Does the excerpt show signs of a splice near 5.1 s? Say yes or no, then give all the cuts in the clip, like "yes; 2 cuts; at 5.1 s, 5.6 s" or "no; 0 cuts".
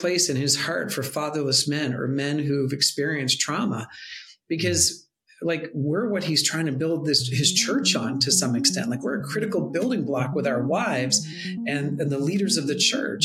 no; 0 cuts